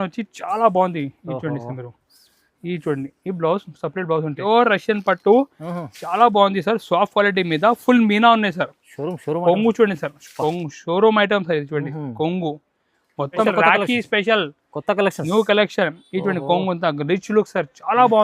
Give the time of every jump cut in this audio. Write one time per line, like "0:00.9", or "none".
0:04.4
0:13.4